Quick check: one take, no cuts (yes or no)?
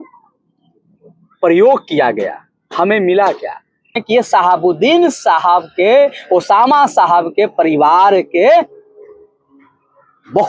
no